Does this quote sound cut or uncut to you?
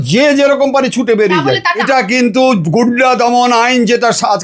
cut